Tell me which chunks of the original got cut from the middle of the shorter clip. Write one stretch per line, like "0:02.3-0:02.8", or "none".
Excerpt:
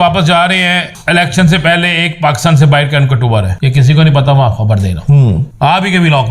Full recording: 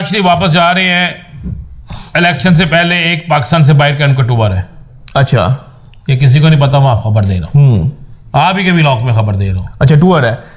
0:01.2-0:02.0
0:04.6-0:06.0
0:07.9-0:08.2